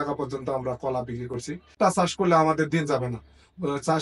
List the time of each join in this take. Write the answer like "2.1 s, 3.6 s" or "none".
1.7 s